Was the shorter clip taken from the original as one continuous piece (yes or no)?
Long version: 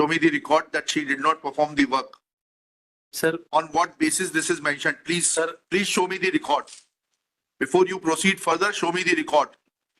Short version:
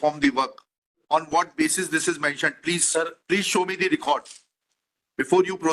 no